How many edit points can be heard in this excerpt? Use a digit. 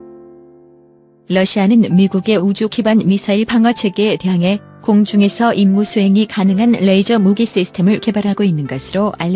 1